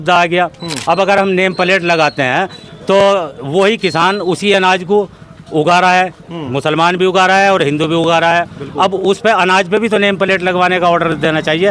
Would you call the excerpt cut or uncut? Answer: uncut